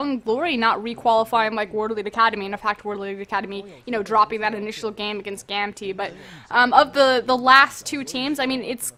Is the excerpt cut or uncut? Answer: uncut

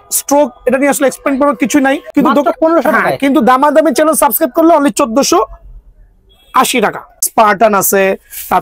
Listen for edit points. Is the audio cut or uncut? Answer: cut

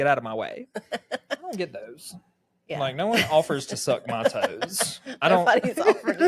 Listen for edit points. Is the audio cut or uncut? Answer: cut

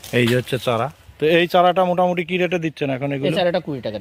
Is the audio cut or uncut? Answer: uncut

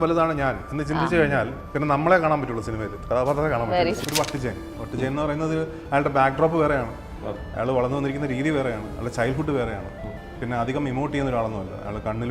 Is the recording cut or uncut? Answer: cut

